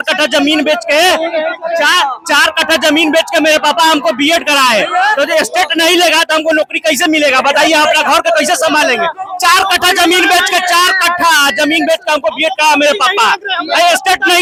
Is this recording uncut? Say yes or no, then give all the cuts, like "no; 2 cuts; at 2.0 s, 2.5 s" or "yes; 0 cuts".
yes; 0 cuts